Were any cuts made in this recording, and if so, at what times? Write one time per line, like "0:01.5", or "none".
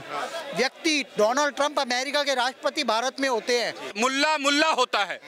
0:03.9